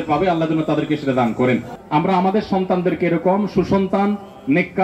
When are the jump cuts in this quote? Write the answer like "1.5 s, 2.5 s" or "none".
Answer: 1.7 s